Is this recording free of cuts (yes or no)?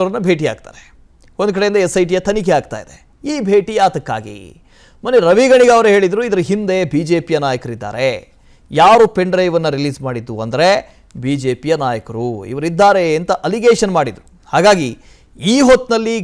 yes